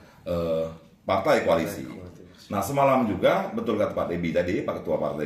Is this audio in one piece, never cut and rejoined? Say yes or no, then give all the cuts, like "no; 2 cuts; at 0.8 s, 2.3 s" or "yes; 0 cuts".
yes; 0 cuts